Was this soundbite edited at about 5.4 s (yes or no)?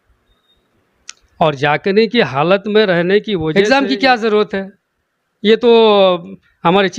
no